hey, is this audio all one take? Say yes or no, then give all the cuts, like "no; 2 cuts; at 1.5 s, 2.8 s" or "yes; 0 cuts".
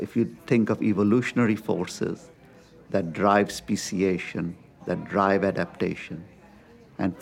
yes; 0 cuts